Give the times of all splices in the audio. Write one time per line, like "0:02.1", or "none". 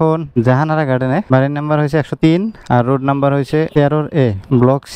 none